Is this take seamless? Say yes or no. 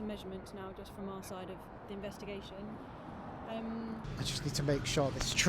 no